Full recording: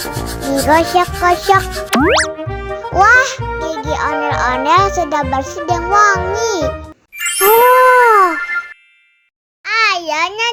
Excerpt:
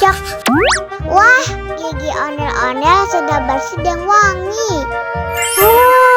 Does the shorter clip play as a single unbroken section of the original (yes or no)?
no